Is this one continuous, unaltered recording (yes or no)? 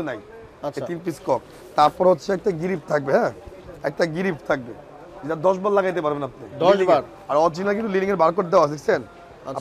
yes